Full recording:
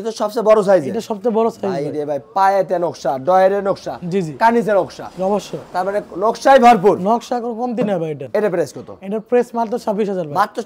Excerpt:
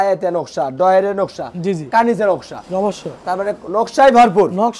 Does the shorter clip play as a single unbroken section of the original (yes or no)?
yes